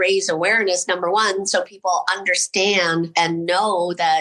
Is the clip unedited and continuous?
no; 1 cut; at 3.1 s

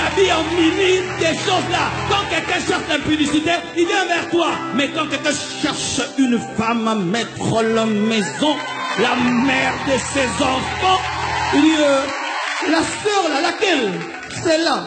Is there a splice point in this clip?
no; 0 cuts

